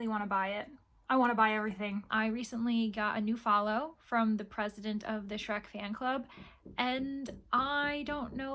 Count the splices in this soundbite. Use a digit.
1